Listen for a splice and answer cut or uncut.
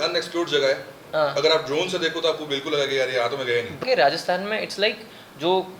cut